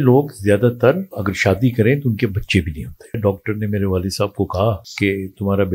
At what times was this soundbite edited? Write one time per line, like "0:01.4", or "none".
0:01.2
0:03.2
0:04.9